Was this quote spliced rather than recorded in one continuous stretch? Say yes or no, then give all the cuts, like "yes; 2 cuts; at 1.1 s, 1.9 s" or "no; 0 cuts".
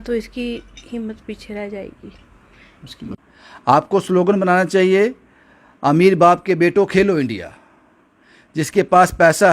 yes; 1 cut; at 3.2 s